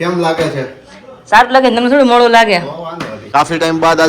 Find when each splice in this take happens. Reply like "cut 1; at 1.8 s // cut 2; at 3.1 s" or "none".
cut 1; at 3.1 s

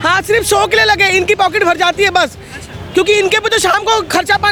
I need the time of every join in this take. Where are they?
none

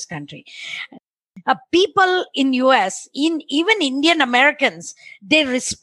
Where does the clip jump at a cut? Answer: cut 1; at 1.1 s

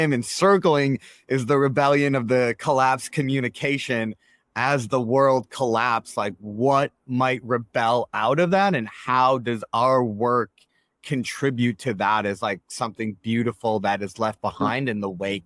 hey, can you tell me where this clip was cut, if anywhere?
none

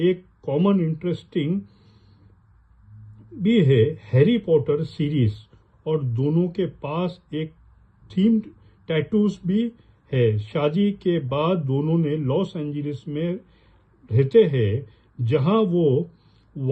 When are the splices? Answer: none

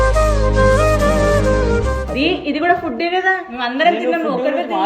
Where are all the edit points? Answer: cut 1; at 2.0 s

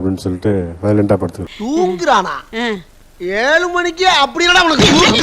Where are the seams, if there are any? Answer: cut 1; at 1.5 s

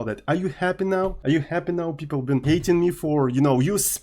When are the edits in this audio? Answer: cut 1; at 1.2 s // cut 2; at 2.4 s

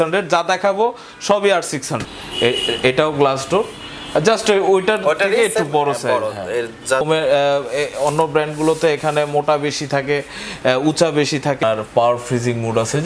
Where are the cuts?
cut 1; at 2.1 s // cut 2; at 7.1 s // cut 3; at 11.6 s

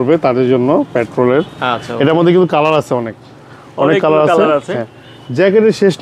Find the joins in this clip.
none

